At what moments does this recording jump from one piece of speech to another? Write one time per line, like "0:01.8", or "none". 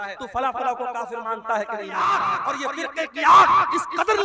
0:01.9